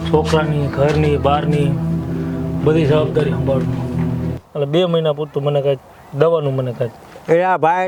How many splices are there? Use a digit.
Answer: 1